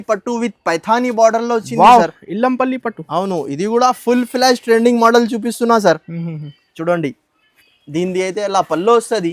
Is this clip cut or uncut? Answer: uncut